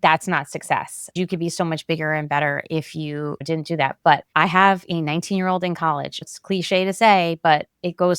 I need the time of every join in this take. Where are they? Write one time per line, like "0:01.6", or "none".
0:01.1
0:03.4
0:04.3
0:06.3